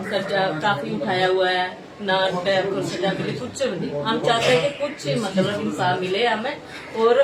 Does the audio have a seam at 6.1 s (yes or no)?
no